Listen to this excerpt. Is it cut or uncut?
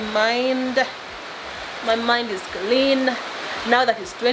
uncut